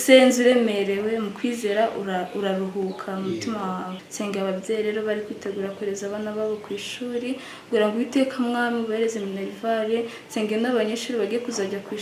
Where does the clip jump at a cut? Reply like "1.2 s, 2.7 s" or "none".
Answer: 4.0 s